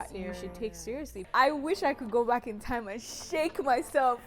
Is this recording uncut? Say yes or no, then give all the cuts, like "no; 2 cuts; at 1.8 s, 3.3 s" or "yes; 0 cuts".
no; 1 cut; at 1.3 s